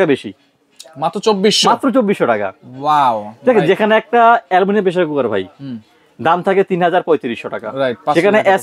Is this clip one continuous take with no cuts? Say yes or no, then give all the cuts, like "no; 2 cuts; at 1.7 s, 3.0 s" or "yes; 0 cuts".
yes; 0 cuts